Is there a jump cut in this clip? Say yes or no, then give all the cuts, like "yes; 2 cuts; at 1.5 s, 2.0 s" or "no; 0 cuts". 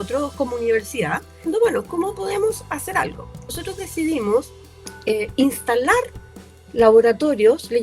yes; 2 cuts; at 1.4 s, 3.6 s